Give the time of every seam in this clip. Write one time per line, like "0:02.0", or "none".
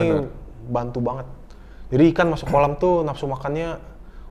none